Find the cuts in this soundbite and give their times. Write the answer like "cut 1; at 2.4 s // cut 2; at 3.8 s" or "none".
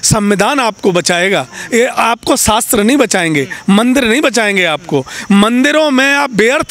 none